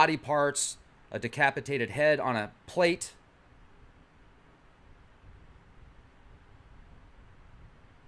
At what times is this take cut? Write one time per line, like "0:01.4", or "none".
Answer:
none